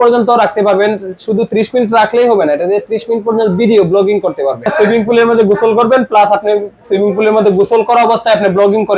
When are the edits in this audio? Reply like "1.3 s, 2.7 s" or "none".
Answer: 4.7 s